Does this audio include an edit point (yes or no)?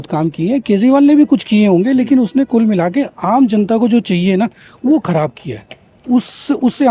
no